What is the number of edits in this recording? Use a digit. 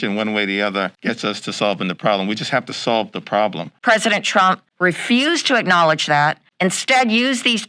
1